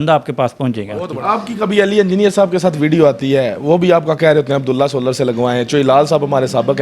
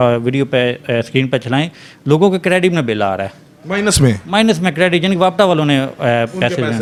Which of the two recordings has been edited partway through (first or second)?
first